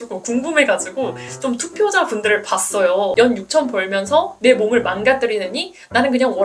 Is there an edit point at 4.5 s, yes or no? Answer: no